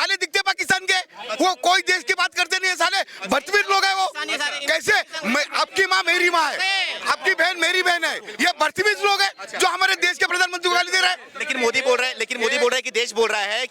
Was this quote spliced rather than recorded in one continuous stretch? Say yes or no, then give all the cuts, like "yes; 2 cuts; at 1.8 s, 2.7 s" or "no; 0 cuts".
no; 0 cuts